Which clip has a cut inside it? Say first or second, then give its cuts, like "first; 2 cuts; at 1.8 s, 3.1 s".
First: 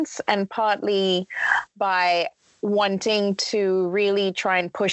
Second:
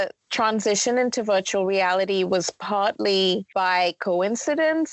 second; 1 cut; at 3.5 s